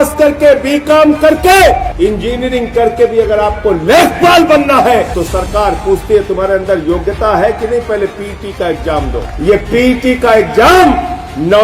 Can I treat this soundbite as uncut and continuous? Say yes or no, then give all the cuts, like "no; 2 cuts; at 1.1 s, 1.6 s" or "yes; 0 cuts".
no; 3 cuts; at 1.9 s, 5.1 s, 9.2 s